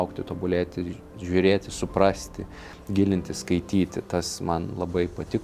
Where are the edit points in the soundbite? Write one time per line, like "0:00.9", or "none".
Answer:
none